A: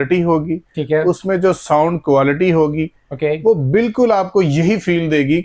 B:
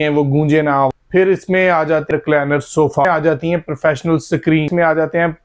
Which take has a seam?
B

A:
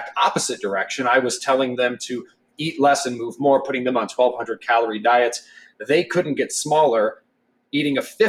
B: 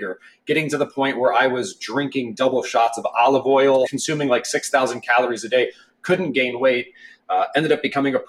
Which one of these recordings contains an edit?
B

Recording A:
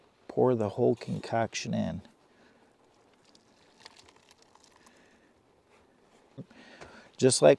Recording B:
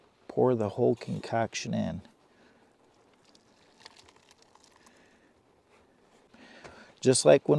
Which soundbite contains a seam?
B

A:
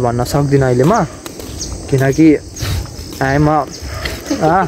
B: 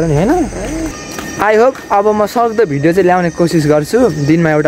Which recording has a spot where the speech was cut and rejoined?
B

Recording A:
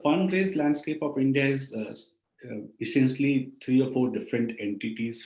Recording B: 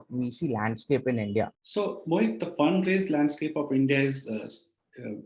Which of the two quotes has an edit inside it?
B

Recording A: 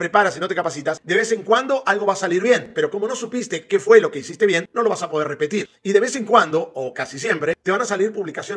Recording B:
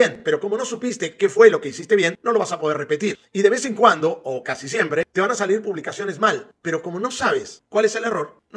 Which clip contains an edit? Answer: A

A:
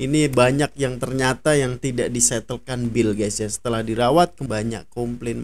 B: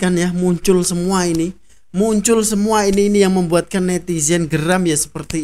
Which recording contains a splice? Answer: A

